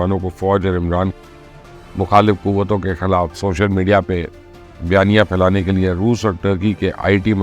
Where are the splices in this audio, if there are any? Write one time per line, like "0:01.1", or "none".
none